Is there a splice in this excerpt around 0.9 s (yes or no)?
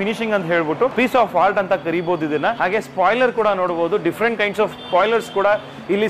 yes